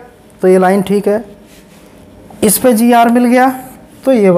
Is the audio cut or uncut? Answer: uncut